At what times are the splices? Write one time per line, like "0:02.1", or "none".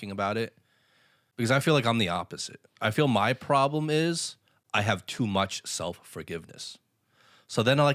none